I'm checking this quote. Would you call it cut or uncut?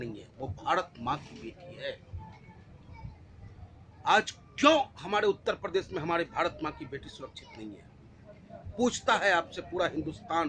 uncut